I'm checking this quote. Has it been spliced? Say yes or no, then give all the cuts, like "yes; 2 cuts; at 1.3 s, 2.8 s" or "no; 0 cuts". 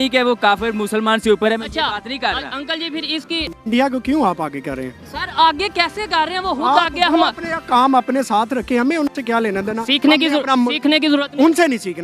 yes; 1 cut; at 3.5 s